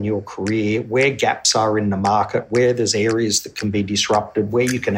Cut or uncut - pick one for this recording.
uncut